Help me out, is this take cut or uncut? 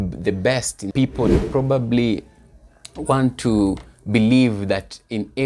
cut